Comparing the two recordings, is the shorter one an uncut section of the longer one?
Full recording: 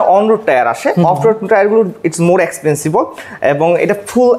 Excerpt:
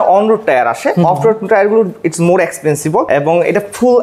no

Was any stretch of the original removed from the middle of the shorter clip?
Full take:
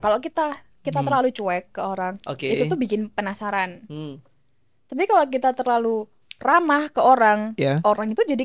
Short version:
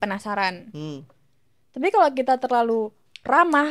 no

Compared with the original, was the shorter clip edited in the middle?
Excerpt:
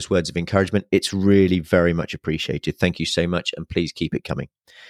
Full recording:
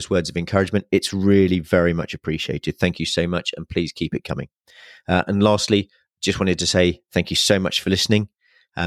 no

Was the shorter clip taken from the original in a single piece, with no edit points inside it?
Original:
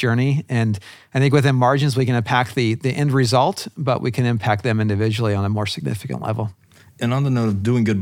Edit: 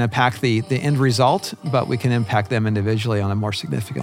yes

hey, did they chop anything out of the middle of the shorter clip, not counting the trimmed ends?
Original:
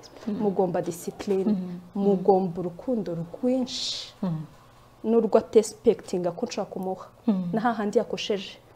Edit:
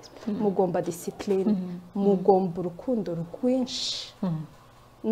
no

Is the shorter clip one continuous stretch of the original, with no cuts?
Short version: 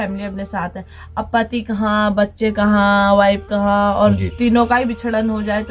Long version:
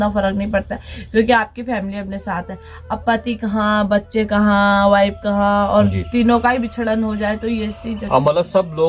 yes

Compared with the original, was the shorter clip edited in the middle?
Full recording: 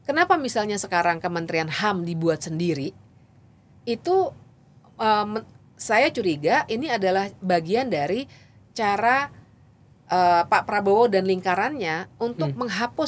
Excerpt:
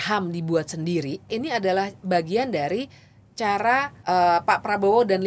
yes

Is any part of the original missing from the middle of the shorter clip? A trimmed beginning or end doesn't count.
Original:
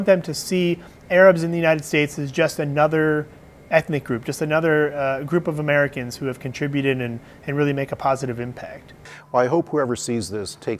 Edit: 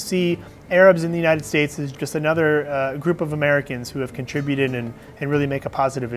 yes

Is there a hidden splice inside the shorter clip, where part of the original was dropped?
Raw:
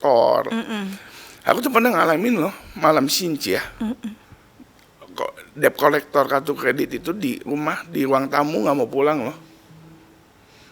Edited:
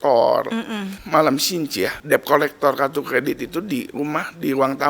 yes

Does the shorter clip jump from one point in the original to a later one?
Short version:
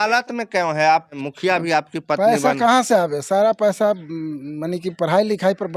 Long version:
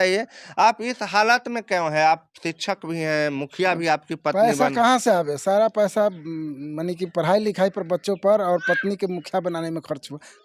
yes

